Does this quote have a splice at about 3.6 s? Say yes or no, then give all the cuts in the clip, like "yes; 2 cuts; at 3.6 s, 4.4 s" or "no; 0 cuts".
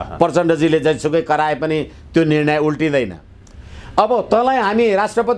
no; 0 cuts